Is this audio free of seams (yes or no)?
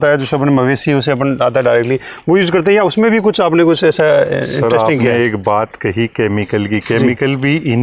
yes